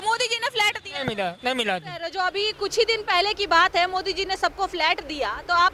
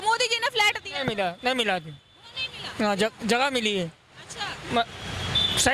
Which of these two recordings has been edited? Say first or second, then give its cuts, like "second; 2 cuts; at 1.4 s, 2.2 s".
first; 1 cut; at 2.1 s